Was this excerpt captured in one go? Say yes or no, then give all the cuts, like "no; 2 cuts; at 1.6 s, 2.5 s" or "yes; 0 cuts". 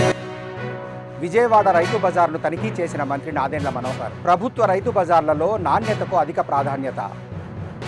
no; 1 cut; at 0.9 s